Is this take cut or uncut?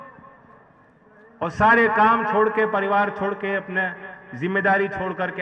uncut